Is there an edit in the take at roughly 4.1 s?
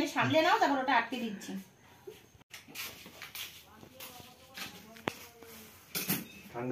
no; 1 cut; at 2.3 s

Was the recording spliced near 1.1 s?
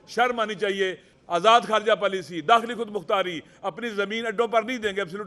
yes; 1 cut; at 1.1 s

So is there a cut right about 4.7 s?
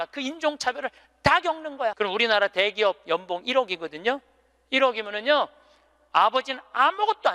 no; 1 cut; at 1.9 s

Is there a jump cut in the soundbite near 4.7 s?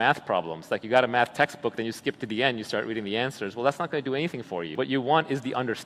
yes; 1 cut; at 4.7 s

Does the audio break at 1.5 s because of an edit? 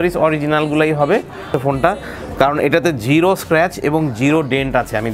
yes; 1 cut; at 1.5 s

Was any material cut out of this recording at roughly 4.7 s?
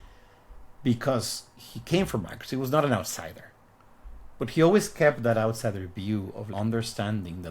no; 0 cuts

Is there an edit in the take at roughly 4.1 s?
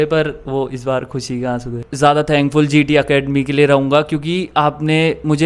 no; 1 cut; at 1.8 s

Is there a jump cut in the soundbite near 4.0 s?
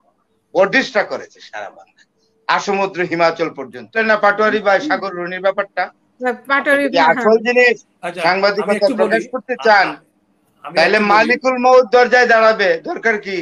yes; 1 cut; at 4.0 s

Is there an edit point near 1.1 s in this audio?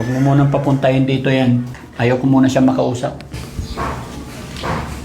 no; 1 cut; at 3.4 s

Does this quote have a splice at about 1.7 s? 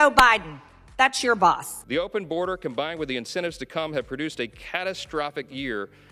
yes; 1 cut; at 1.7 s

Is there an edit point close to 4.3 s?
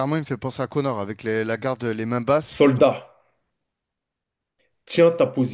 no; 1 cut; at 2.5 s

